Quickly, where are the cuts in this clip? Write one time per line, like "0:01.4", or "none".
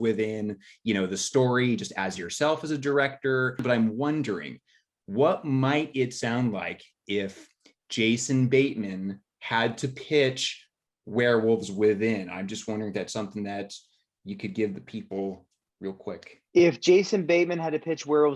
0:03.6
0:16.3